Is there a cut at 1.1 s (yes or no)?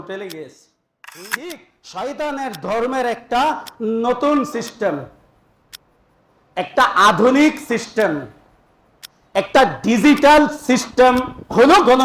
yes